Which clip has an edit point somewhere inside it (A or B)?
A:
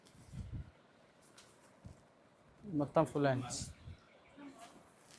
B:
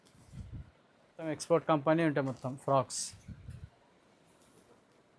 B